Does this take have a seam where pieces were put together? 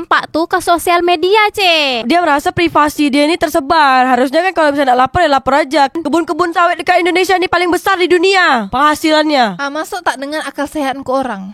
yes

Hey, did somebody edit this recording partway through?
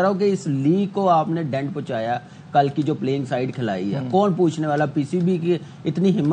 no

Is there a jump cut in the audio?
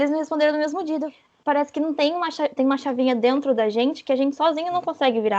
yes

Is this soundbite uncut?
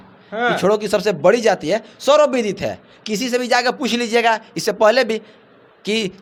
yes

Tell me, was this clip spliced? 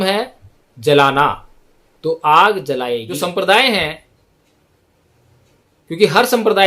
yes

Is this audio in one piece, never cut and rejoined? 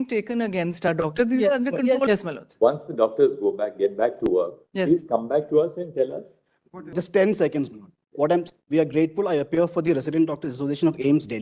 no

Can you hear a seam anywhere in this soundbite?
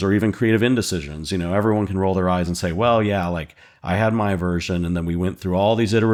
no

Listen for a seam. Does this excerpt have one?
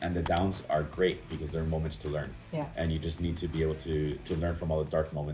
no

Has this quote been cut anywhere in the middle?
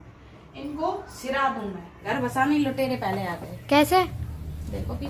yes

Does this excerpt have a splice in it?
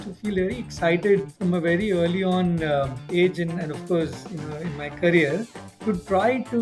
yes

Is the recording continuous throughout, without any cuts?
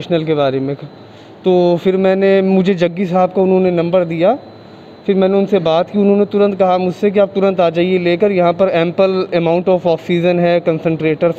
yes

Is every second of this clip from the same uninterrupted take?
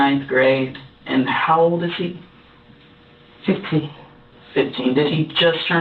yes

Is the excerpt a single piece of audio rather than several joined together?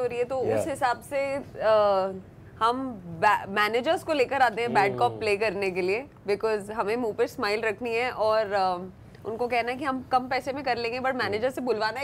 yes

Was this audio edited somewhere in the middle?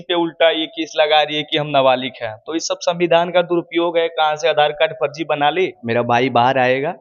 yes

